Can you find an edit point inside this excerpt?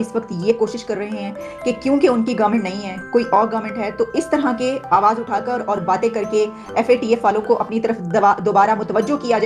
no; 0 cuts

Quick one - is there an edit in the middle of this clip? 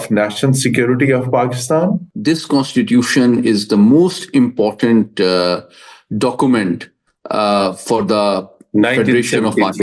yes; 1 cut; at 2.0 s

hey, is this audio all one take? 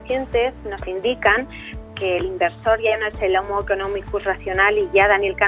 no; 1 cut; at 1.7 s

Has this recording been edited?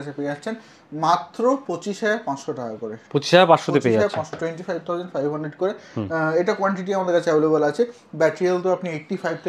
no; 0 cuts

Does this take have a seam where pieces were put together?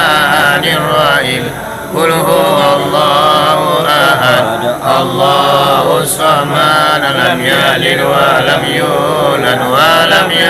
no; 0 cuts

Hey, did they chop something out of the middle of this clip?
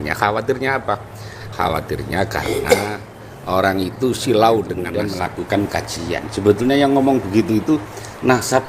yes; 1 cut; at 4.9 s

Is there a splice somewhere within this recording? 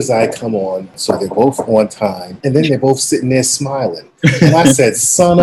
yes; 2 cuts; at 0.9 s, 2.3 s

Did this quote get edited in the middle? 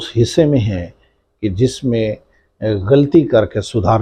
no; 0 cuts

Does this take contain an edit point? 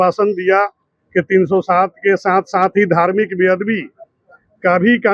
no; 0 cuts

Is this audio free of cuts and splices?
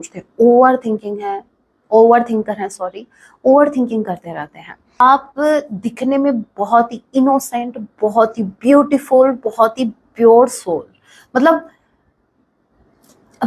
no; 1 cut; at 5.0 s

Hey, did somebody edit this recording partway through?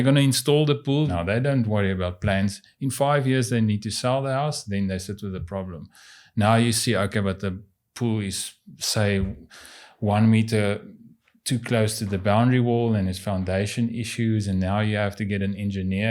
yes; 1 cut; at 1.1 s

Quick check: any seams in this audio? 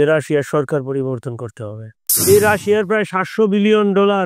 yes; 1 cut; at 2.1 s

